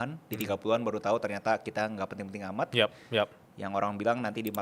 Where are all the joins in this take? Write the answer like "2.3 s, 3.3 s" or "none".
none